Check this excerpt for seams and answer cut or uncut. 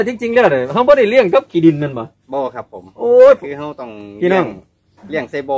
uncut